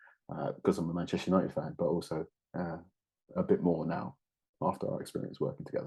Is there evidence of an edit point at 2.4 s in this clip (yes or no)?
no